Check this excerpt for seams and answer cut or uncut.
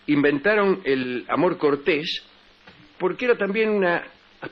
cut